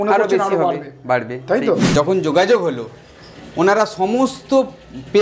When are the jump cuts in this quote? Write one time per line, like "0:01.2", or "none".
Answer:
0:01.9